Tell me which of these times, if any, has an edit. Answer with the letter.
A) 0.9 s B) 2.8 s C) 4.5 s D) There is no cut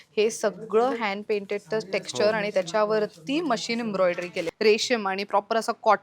C